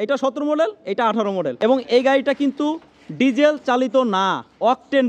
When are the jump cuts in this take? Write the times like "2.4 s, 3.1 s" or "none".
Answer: 1.5 s